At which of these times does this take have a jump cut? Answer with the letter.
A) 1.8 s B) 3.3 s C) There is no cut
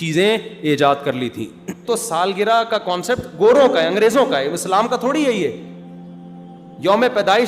A